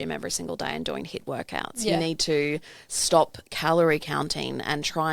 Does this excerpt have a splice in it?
no; 0 cuts

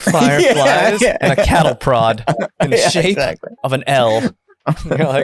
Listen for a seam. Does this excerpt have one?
no; 0 cuts

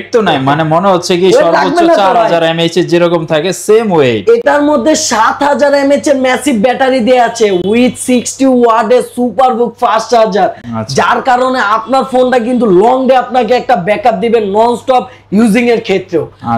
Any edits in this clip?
no; 0 cuts

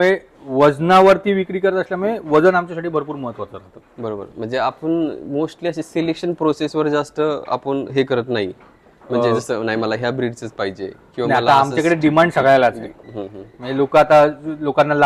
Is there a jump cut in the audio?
no; 0 cuts

